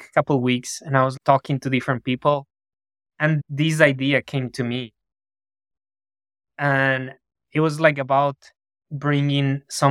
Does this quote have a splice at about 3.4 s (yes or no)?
yes